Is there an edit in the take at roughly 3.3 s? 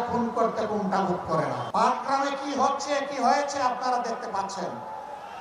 no; 1 cut; at 1.6 s

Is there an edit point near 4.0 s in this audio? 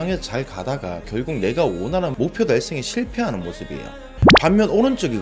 no; 2 cuts; at 1.0 s, 2.1 s

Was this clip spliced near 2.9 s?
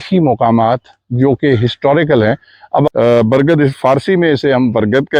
yes; 1 cut; at 2.9 s

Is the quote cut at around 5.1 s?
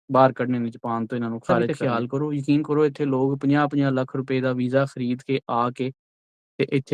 no; 1 cut; at 1.6 s

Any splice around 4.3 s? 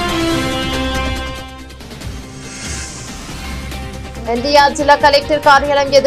yes; 1 cut; at 4.3 s

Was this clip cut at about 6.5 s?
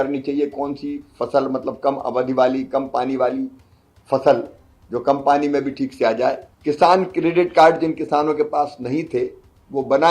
yes; 1 cut; at 6.5 s

